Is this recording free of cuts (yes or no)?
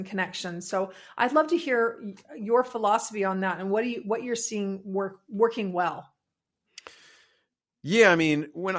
yes